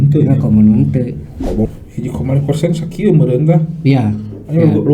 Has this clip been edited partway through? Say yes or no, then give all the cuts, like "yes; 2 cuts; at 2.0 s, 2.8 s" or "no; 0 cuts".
yes; 1 cut; at 1.7 s